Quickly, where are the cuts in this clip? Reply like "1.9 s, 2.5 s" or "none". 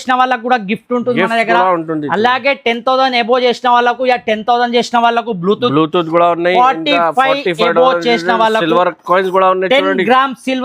none

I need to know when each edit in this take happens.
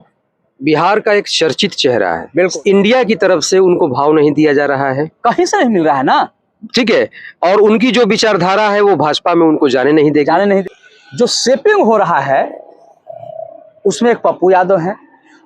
2.5 s, 10.6 s

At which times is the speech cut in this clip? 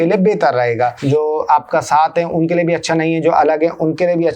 1.0 s

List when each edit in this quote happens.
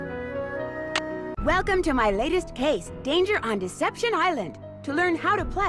0.9 s, 2.8 s

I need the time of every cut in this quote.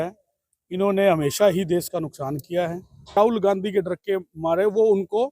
3.2 s

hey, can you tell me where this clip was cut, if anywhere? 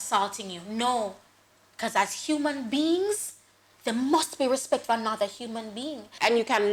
none

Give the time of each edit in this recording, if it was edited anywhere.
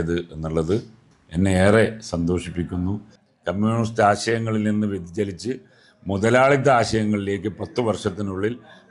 3.1 s

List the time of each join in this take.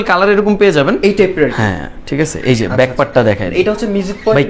none

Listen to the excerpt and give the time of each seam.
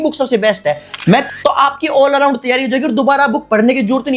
1.2 s

